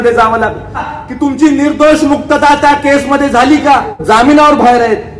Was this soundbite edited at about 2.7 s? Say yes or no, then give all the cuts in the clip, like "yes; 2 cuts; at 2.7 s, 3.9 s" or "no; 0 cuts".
no; 2 cuts; at 0.9 s, 3.9 s